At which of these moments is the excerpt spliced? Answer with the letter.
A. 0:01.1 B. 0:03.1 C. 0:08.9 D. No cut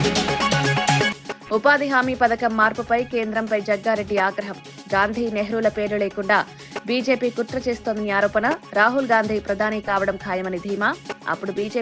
A